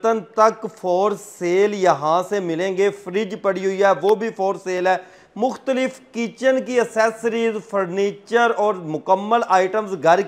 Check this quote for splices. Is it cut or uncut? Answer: uncut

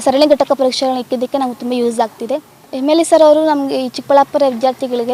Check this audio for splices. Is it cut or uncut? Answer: cut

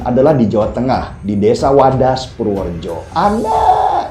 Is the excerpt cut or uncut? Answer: cut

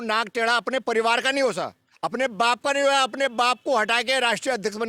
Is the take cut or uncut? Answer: uncut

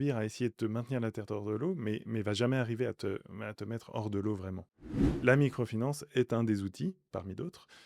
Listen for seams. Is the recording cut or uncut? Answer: cut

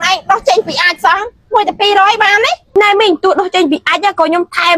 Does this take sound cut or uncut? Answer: cut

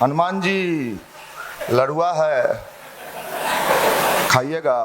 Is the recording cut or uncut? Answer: uncut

